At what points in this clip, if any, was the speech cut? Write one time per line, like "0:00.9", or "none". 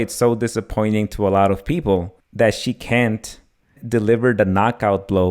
0:02.2
0:03.8